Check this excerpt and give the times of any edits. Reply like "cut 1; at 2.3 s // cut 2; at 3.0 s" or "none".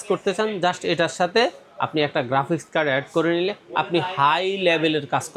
none

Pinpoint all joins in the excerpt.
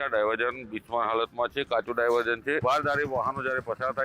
cut 1; at 2.6 s

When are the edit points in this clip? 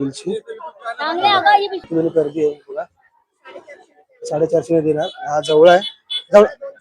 cut 1; at 1.9 s

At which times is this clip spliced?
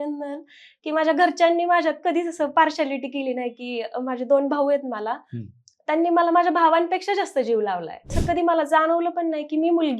cut 1; at 8.2 s

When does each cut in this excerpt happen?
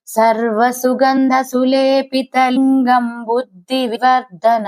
cut 1; at 1.2 s // cut 2; at 2.5 s // cut 3; at 4.0 s

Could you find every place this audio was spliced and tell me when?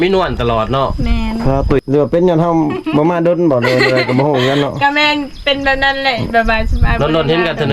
cut 1; at 1.8 s

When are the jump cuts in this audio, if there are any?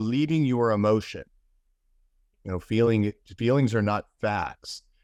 none

